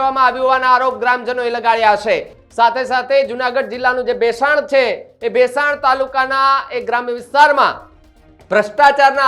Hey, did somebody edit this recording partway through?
no; 0 cuts

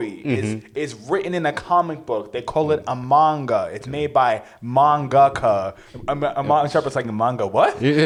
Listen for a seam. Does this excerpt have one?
no; 0 cuts

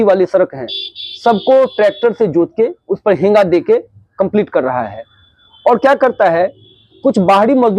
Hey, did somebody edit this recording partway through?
no; 0 cuts

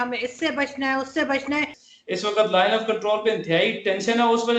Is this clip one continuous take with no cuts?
no; 1 cut; at 1.9 s

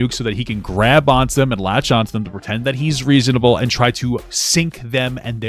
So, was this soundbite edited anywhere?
no; 0 cuts

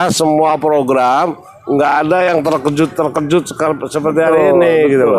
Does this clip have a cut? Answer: no; 0 cuts

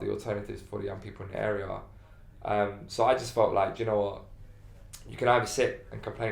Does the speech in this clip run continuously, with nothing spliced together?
yes; 0 cuts

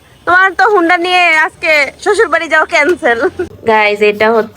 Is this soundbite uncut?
no; 1 cut; at 3.5 s

